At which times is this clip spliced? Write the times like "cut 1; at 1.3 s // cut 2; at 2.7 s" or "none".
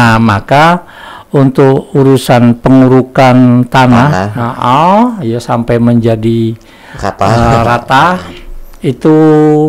none